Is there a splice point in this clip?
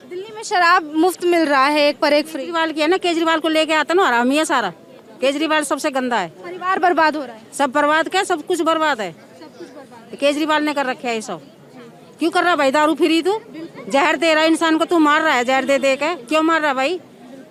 no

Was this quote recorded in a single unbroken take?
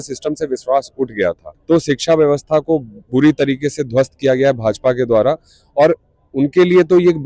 no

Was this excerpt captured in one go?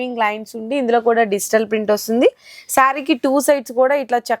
yes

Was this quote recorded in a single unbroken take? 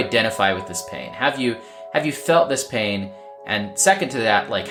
yes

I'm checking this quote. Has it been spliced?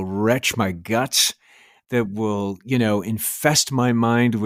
no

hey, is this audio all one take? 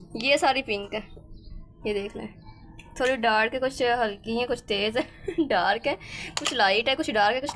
no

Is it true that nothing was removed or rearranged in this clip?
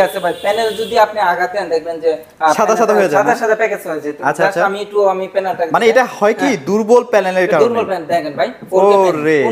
yes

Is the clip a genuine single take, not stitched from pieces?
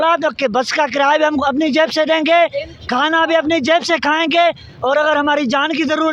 yes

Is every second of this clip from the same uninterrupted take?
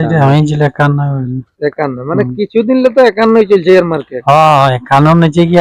yes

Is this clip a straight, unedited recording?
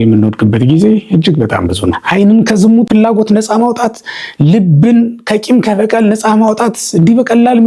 no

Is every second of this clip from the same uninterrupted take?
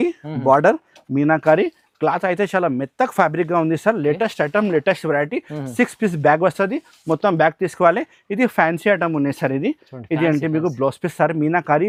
yes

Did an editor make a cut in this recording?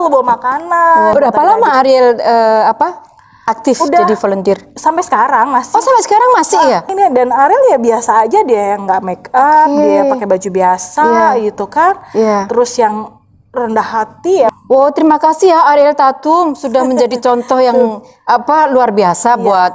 yes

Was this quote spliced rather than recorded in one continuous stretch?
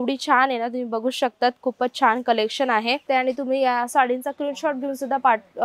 yes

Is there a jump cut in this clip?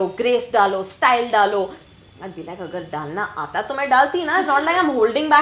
no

